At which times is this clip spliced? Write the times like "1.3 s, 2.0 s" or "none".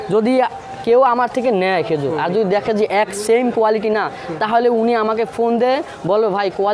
none